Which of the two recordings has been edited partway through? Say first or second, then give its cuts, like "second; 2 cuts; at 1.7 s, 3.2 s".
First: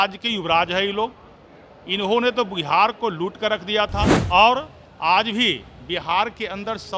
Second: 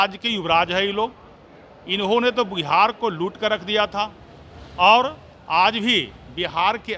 first; 1 cut; at 4.2 s